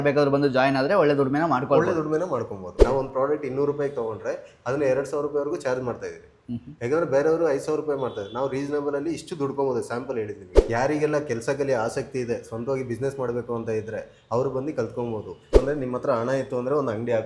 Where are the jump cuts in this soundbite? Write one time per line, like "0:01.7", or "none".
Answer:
0:02.7
0:10.5
0:15.6